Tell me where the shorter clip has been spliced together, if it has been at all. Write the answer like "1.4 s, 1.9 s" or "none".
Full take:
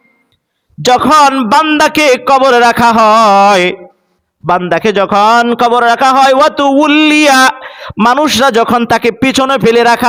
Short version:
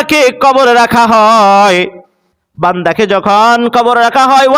none